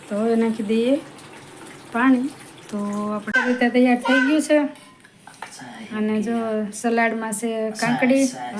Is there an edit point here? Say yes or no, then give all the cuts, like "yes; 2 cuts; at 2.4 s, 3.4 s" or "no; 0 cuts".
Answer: yes; 1 cut; at 3.2 s